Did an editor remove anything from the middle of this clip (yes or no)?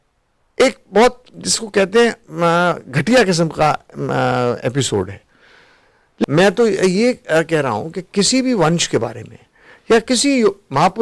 no